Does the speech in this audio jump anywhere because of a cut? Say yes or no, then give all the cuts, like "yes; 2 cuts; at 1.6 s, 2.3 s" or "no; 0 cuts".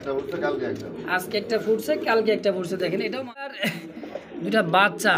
yes; 1 cut; at 3.5 s